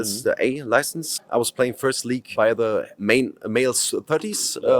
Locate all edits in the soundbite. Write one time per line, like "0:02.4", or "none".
0:01.1